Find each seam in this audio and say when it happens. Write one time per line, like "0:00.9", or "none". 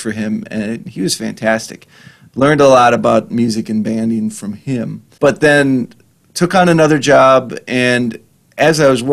0:05.0